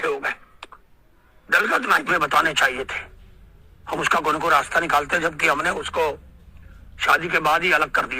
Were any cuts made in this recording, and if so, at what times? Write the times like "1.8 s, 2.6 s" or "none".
2.1 s

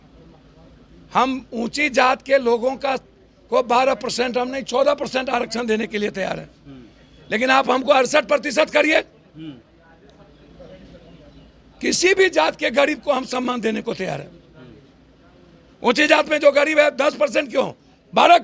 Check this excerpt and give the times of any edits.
none

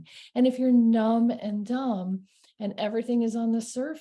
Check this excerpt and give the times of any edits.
none

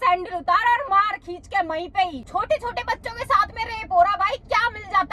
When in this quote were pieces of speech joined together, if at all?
2.2 s

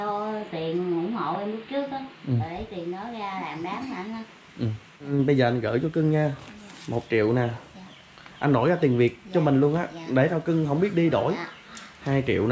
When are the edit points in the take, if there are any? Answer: 5.1 s

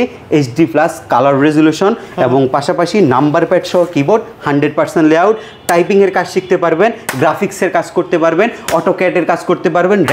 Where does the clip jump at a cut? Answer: none

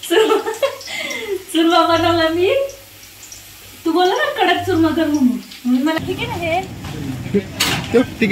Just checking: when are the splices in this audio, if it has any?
6.0 s

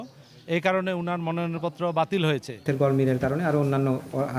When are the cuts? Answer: 2.6 s

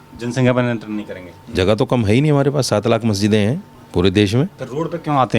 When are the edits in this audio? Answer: 1.4 s, 3.7 s

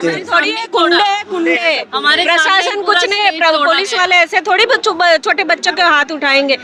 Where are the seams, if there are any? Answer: none

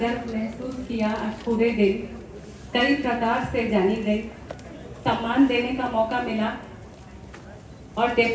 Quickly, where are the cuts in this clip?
none

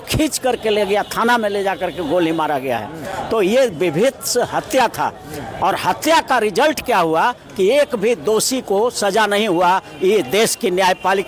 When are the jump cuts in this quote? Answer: none

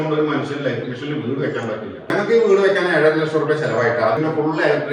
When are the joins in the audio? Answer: 2.1 s, 4.2 s

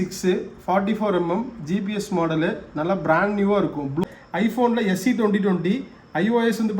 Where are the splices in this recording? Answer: 4.0 s

